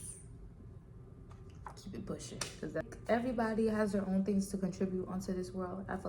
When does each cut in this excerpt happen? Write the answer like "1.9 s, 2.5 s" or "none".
2.9 s